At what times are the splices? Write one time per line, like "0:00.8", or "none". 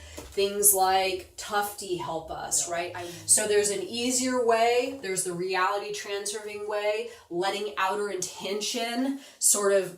0:03.2